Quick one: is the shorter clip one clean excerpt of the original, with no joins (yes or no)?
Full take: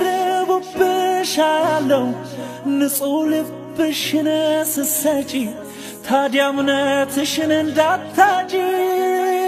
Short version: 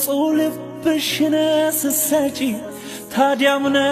yes